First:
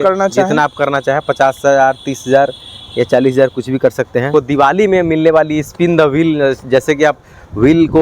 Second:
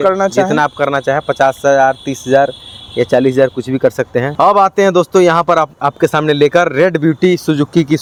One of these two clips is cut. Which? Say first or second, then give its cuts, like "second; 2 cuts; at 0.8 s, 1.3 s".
first; 1 cut; at 4.3 s